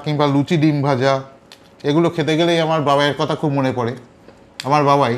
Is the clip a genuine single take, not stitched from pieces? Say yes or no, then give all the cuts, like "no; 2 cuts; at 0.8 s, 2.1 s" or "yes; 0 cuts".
yes; 0 cuts